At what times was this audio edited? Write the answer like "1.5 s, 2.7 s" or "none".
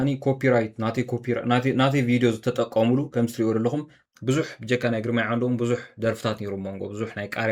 3.9 s